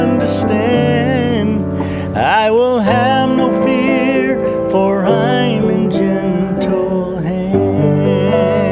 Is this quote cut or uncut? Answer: uncut